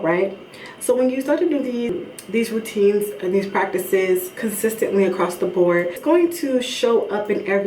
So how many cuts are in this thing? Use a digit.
2